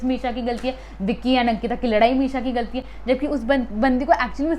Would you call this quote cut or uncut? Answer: uncut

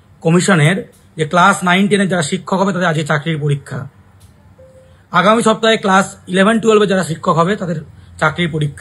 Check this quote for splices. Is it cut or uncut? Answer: cut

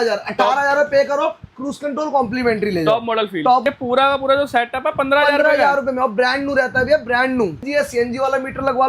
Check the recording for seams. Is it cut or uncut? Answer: cut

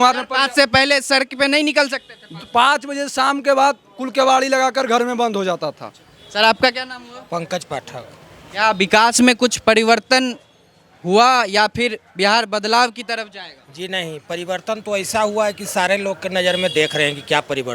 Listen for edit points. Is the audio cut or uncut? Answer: uncut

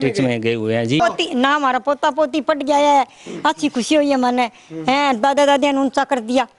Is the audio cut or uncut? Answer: cut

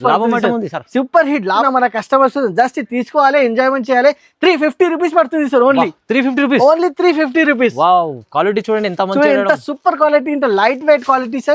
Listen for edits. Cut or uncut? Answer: cut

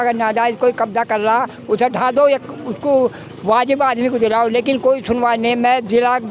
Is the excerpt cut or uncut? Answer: uncut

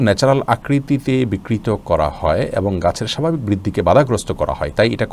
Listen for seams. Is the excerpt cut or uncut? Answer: uncut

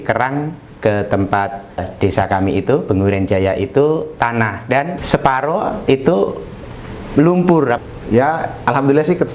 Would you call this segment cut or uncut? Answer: cut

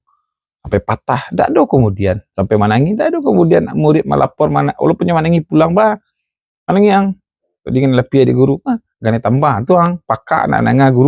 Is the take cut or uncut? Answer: uncut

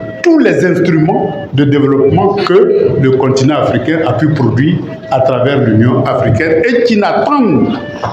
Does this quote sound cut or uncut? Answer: uncut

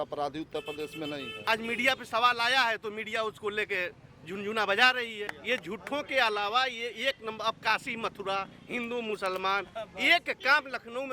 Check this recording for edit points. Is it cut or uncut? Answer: cut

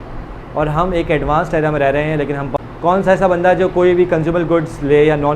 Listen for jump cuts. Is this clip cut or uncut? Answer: cut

